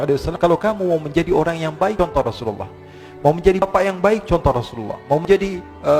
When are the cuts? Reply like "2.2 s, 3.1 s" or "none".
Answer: none

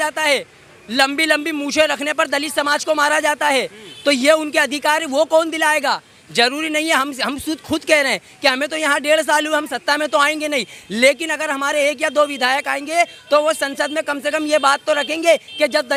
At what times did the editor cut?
none

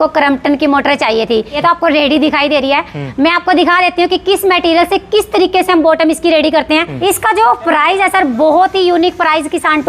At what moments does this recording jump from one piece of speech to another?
1.5 s, 6.9 s

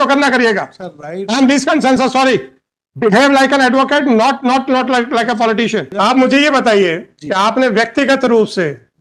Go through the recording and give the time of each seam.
5.9 s

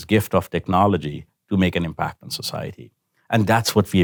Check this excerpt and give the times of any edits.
none

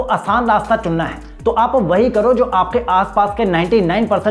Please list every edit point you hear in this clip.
none

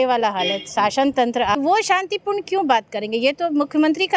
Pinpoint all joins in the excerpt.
1.6 s

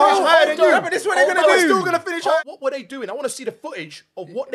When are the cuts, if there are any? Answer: 2.4 s

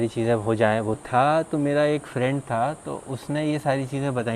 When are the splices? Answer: 1.0 s

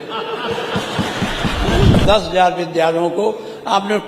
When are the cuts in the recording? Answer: 2.0 s

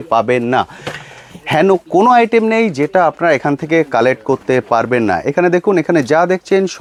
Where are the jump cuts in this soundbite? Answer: none

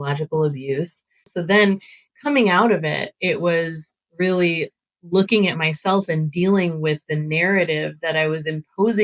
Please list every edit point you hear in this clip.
1.3 s

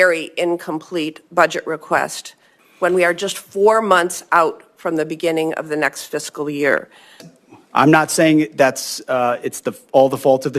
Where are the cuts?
7.3 s

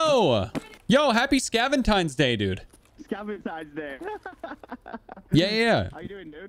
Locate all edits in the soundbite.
none

